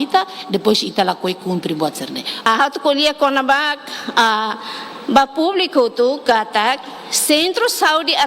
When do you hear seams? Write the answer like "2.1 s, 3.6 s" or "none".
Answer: none